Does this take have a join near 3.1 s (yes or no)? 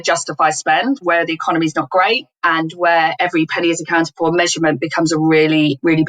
yes